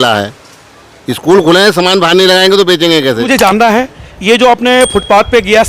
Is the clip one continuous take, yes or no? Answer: no